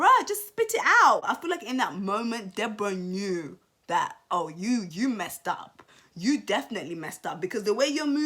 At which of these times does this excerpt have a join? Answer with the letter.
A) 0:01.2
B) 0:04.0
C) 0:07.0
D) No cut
A